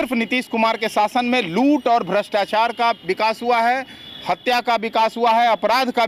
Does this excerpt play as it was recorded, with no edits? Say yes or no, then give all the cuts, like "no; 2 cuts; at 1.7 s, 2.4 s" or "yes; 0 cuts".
yes; 0 cuts